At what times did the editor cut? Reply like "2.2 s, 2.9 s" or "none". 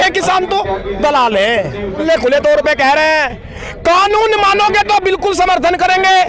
2.0 s